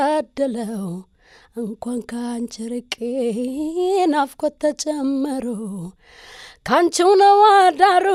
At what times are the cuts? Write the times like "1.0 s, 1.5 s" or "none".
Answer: none